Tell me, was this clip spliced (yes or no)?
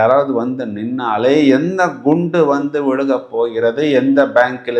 no